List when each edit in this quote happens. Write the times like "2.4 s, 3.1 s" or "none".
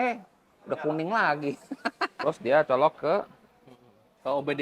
2.1 s

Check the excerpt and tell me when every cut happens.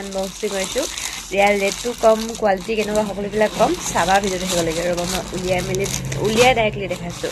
none

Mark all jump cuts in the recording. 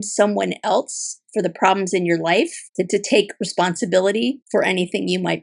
2.6 s, 4.4 s

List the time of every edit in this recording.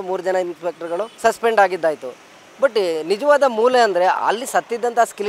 1.1 s

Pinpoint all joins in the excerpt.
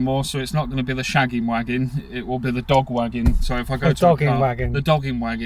none

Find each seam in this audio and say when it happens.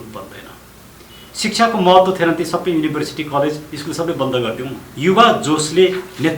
4.8 s

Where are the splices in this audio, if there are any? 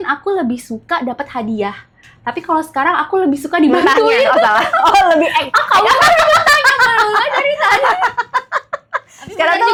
none

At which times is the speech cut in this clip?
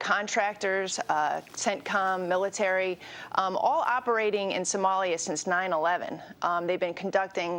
none

